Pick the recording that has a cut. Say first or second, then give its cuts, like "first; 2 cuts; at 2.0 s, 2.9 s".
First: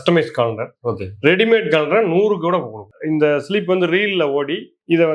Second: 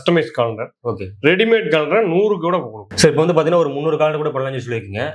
first; 1 cut; at 2.9 s